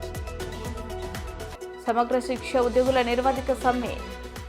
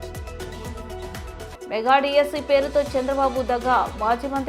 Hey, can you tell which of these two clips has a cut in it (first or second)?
second